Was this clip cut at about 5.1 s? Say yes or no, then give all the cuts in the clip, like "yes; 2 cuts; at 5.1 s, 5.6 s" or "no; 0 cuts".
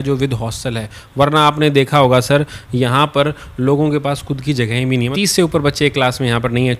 yes; 1 cut; at 5.1 s